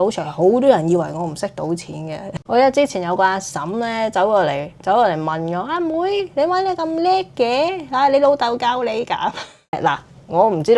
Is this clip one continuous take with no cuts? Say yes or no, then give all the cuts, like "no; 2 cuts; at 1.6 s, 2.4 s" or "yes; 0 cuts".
no; 2 cuts; at 2.3 s, 9.8 s